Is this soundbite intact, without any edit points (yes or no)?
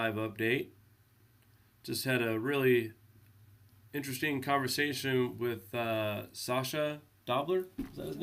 no